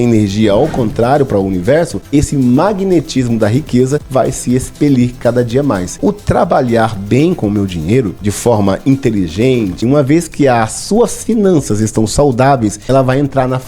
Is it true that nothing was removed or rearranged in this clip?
no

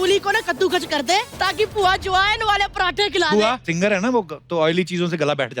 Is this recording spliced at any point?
yes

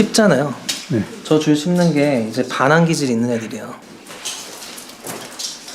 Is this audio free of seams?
no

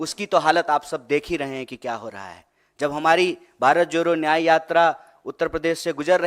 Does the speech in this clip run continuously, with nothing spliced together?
yes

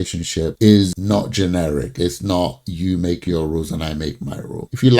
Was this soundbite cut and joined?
yes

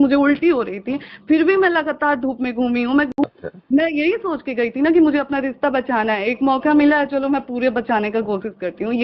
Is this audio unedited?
no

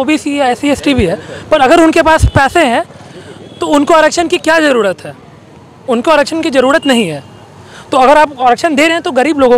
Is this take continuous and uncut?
yes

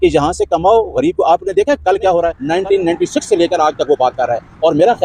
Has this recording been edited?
yes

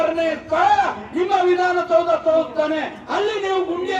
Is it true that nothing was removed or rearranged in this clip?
yes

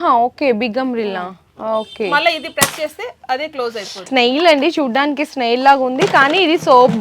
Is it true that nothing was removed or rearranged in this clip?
no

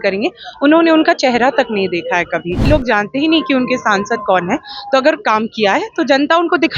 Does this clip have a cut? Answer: yes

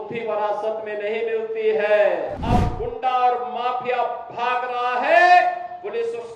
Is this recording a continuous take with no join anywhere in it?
no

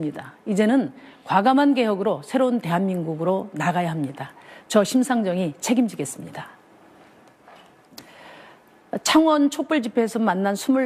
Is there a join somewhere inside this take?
no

